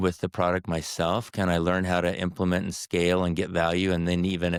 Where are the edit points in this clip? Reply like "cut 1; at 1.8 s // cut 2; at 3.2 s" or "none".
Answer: none